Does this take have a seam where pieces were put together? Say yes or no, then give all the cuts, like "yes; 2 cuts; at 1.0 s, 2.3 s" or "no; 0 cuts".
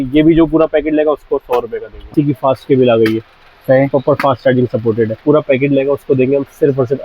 yes; 2 cuts; at 2.1 s, 5.2 s